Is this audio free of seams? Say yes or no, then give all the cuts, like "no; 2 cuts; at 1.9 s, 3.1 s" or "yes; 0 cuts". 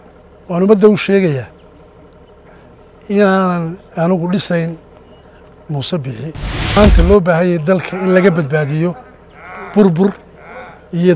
no; 1 cut; at 6.8 s